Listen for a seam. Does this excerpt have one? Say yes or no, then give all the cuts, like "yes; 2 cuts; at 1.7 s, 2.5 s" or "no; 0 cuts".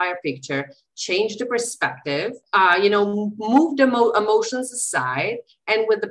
yes; 1 cut; at 2.4 s